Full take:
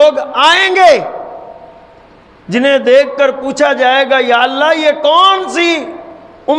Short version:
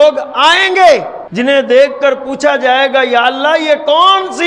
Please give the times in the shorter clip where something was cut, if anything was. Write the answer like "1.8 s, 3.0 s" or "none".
1.2 s